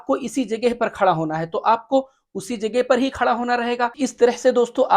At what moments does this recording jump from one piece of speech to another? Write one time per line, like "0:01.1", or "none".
0:04.0